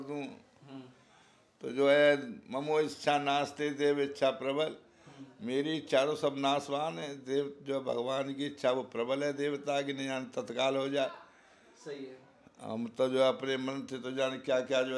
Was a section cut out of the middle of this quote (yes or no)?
no